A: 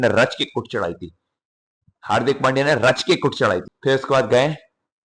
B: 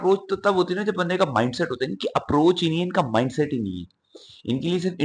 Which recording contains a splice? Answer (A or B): A